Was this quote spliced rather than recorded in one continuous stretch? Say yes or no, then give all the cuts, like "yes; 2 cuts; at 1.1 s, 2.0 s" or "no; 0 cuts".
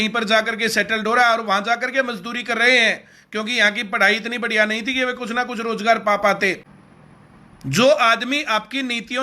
yes; 1 cut; at 6.7 s